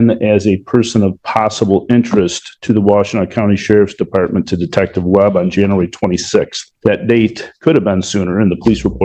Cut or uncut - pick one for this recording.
uncut